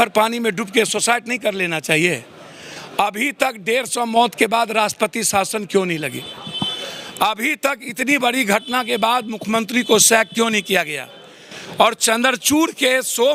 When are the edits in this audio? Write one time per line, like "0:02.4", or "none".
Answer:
none